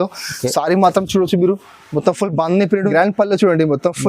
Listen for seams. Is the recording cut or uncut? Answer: cut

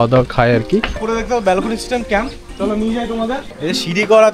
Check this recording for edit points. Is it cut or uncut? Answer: cut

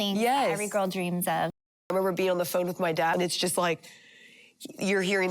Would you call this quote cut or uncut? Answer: cut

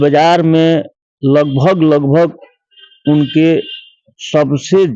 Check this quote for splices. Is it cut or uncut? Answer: uncut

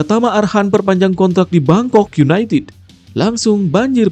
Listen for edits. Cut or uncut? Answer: uncut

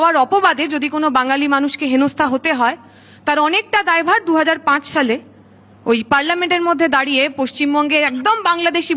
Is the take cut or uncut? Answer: uncut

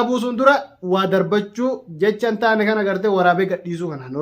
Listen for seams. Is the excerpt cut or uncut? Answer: uncut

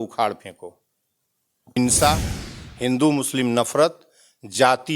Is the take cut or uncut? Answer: cut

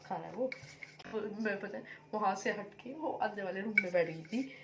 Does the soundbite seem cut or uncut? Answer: cut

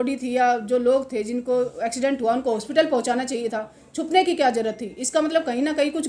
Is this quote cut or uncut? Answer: uncut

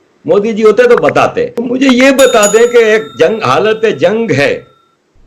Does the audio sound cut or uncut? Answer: cut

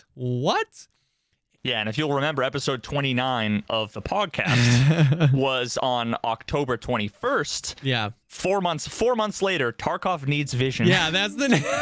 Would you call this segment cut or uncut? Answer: uncut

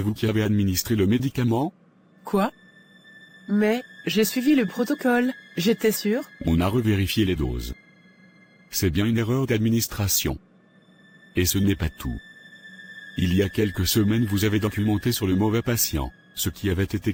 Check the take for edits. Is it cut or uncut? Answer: uncut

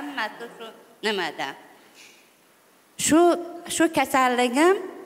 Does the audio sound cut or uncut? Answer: uncut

